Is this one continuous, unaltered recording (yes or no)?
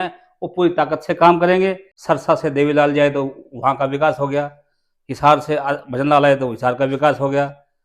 no